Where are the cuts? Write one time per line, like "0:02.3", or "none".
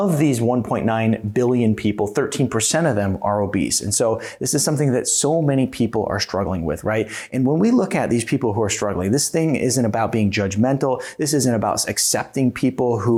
none